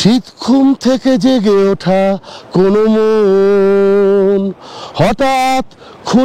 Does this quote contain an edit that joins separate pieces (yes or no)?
no